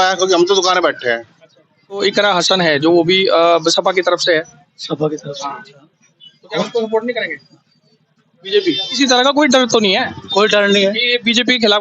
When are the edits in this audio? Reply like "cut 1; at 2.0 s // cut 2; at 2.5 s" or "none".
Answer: cut 1; at 2.0 s // cut 2; at 8.9 s